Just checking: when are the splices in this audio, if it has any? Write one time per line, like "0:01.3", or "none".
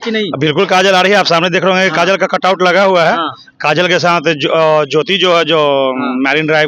0:03.4